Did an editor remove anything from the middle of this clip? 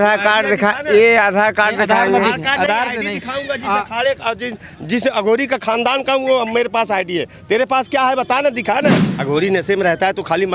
yes; 1 cut; at 9.1 s

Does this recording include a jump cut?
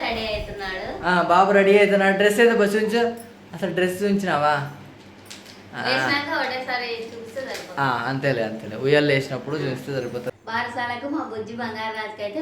yes; 1 cut; at 10.3 s

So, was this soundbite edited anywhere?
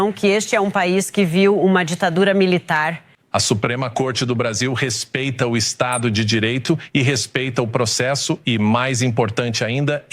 yes; 1 cut; at 3.1 s

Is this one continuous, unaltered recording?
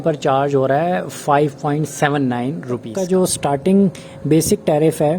no; 1 cut; at 3.4 s

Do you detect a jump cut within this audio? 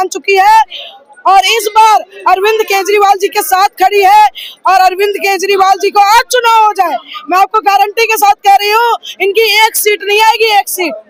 no; 0 cuts

